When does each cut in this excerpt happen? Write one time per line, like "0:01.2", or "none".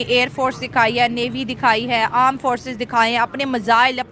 none

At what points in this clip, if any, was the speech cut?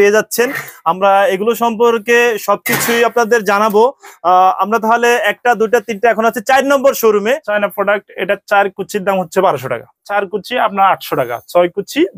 0:07.5
0:10.1

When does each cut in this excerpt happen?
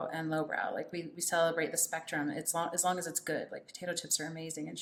none

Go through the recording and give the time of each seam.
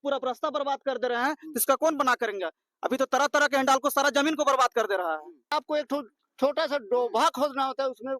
0:05.5

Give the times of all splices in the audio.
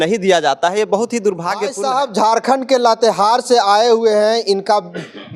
0:01.7

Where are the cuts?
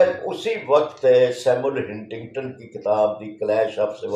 none

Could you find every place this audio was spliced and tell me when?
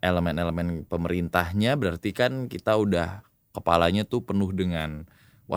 none

